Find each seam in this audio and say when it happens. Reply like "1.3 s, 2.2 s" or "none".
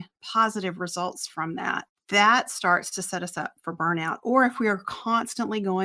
1.9 s